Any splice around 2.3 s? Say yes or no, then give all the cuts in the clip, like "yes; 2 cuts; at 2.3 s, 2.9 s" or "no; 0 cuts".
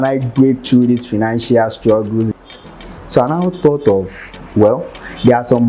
yes; 1 cut; at 2.3 s